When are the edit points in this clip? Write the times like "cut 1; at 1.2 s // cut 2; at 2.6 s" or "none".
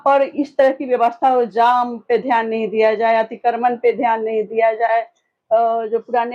none